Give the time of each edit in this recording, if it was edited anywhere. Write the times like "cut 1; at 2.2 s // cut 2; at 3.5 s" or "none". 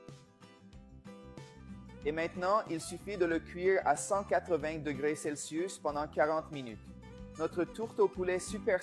cut 1; at 2.0 s

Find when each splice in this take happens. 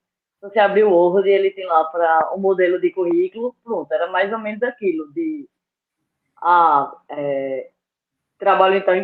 none

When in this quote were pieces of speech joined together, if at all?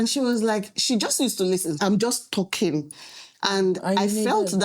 cut 1; at 1.8 s

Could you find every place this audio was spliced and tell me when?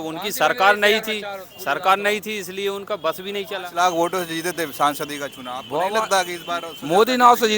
cut 1; at 3.6 s

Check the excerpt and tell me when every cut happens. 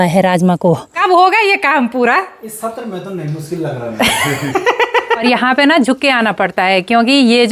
cut 1; at 0.8 s // cut 2; at 5.2 s

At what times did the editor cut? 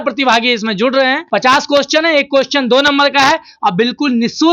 cut 1; at 1.2 s

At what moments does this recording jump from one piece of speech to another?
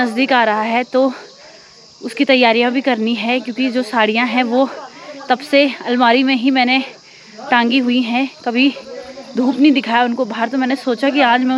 none

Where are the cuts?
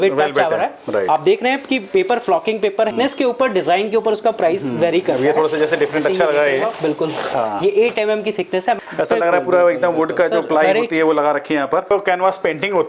cut 1; at 2.9 s // cut 2; at 8.8 s // cut 3; at 11.9 s

